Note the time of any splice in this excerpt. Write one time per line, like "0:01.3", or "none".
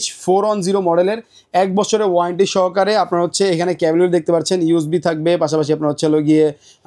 none